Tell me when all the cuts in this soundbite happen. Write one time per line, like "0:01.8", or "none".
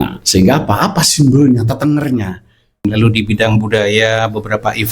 0:02.8